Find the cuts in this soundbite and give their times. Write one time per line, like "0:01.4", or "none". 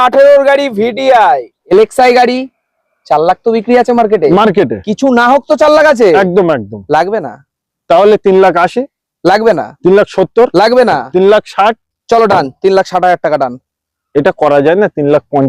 0:01.7